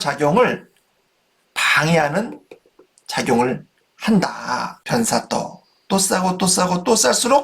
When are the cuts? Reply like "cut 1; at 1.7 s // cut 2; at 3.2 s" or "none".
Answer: cut 1; at 4.8 s